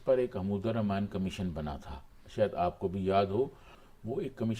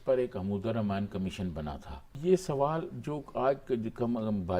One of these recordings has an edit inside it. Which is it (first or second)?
second